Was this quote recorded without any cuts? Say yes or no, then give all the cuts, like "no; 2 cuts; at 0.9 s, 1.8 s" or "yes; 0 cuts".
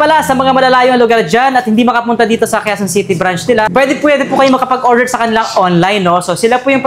no; 1 cut; at 3.7 s